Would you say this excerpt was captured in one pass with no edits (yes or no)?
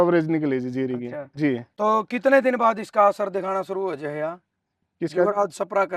yes